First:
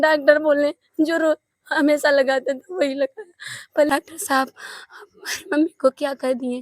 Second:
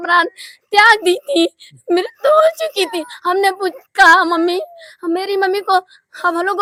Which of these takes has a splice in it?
first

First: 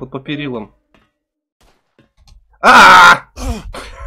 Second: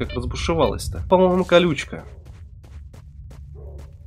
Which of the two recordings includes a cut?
second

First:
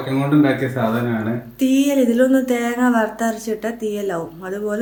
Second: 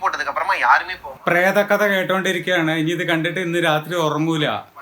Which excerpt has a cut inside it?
second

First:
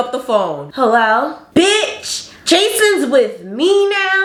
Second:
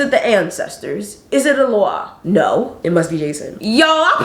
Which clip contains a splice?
second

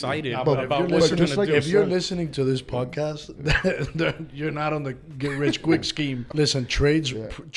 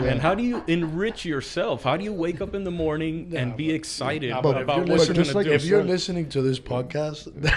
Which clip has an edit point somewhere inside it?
first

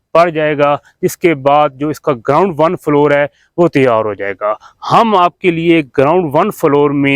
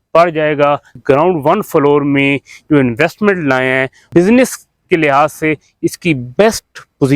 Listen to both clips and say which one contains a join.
second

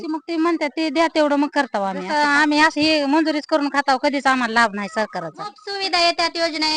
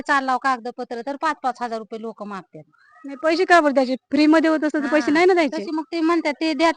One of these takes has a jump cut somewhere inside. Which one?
first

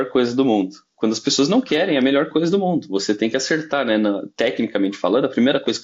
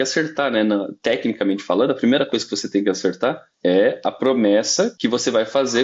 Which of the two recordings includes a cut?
second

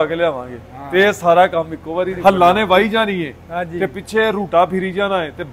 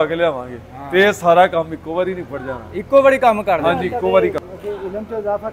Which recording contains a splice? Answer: first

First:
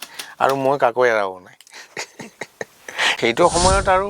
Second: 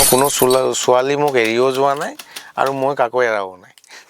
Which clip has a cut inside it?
first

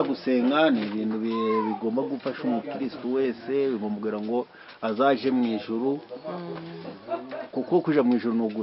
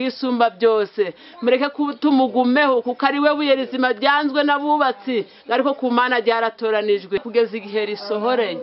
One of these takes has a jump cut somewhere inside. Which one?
second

